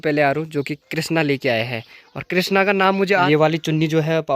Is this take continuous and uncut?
no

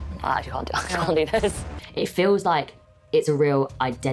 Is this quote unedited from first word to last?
no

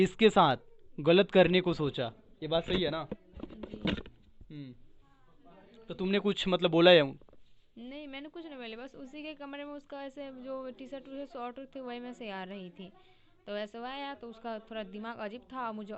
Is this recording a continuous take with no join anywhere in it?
yes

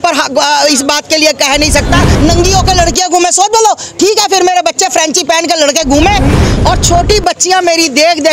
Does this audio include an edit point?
yes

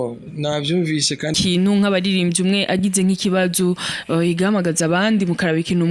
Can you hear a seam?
yes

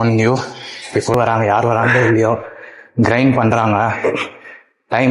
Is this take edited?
yes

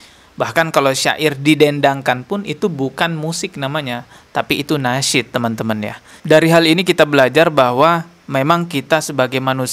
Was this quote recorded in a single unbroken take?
no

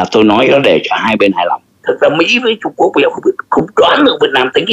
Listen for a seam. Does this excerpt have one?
yes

